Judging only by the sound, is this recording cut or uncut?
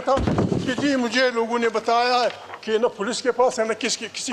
uncut